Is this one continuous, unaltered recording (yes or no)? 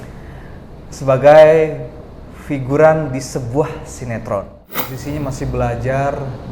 no